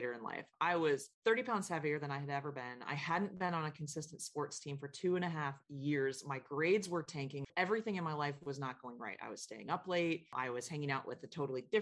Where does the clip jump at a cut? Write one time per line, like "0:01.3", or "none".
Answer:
0:01.1
0:07.5